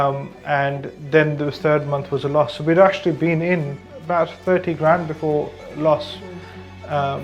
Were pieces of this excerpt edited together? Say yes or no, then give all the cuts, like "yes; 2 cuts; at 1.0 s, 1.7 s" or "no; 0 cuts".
no; 0 cuts